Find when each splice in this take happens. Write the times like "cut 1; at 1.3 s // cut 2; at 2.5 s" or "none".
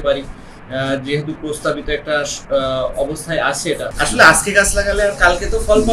cut 1; at 3.9 s